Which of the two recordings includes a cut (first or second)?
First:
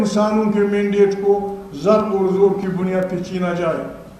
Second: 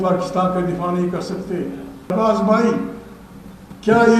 second